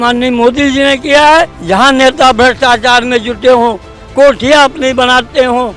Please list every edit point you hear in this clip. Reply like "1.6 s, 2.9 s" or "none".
1.6 s